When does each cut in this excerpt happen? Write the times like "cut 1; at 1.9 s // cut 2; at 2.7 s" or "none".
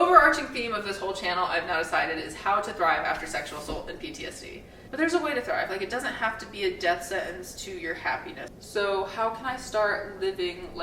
cut 1; at 4.7 s // cut 2; at 8.4 s